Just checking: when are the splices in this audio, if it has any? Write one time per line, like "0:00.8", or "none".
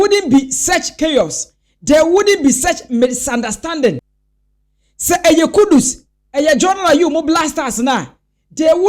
0:04.1

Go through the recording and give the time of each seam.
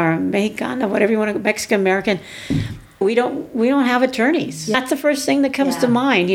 0:03.0
0:04.7

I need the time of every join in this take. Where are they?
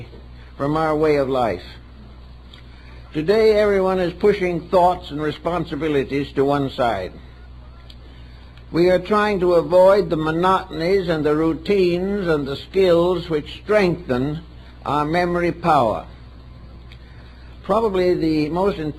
none

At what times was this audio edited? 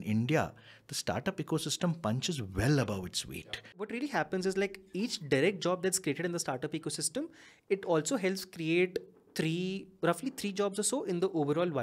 0:03.9

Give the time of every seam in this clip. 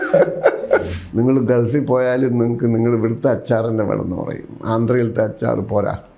0:01.0

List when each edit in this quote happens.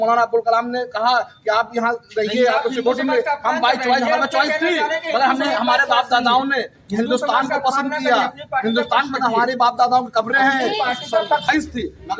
none

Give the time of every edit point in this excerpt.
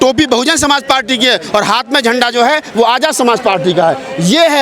none

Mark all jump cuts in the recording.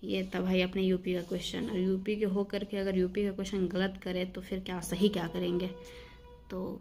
none

